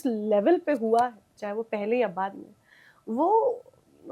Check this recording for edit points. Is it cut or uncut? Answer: uncut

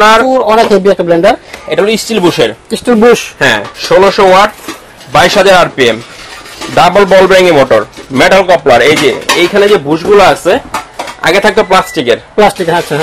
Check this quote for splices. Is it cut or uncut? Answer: uncut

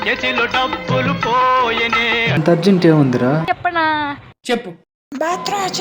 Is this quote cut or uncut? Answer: cut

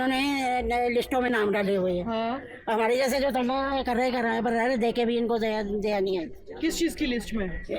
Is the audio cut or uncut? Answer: uncut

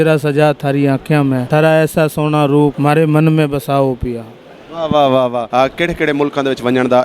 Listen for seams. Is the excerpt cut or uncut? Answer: cut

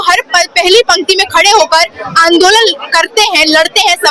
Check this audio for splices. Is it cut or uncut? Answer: uncut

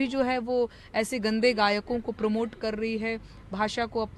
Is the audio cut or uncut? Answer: uncut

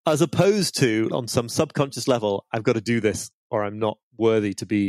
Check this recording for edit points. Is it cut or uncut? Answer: cut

